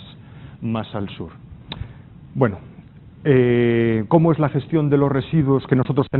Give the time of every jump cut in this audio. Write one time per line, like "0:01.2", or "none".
0:01.8